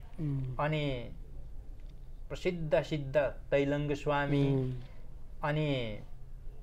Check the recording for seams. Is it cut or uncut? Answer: uncut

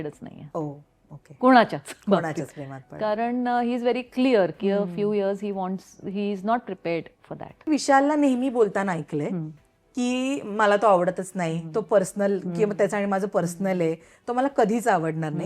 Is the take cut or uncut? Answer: cut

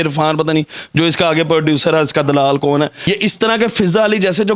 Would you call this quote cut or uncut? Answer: cut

